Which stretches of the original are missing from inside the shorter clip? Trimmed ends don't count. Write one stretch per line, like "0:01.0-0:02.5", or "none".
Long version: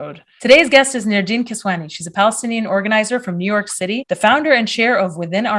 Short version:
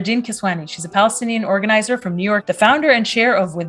0:03.7-0:04.1